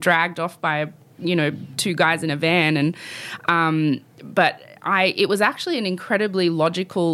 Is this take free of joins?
yes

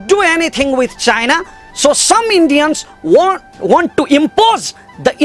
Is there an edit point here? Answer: no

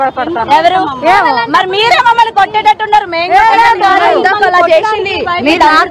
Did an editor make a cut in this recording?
no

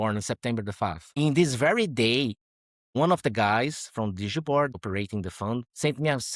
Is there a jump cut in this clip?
yes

